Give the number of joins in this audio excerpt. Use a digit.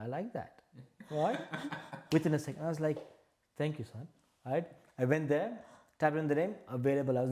0